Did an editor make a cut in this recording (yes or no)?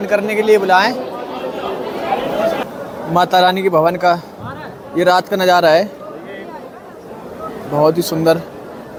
no